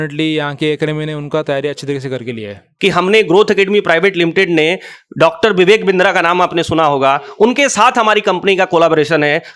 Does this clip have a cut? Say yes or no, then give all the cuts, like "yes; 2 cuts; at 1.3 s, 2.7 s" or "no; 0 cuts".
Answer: yes; 1 cut; at 2.7 s